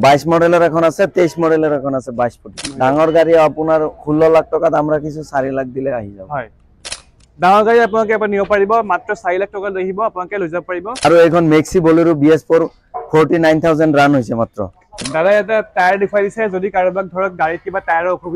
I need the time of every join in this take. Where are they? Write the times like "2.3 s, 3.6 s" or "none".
2.5 s, 11.0 s, 15.1 s